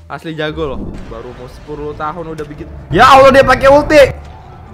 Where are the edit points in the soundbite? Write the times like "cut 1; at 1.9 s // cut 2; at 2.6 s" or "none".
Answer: cut 1; at 1.0 s